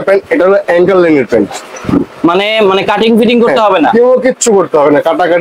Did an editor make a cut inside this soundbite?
no; 0 cuts

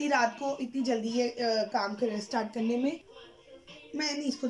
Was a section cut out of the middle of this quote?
yes; 1 cut; at 3.1 s

